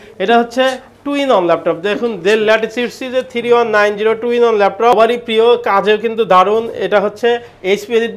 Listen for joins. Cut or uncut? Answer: cut